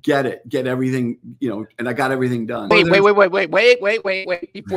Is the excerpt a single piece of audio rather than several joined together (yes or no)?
no